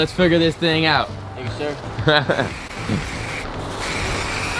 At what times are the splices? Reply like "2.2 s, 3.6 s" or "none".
none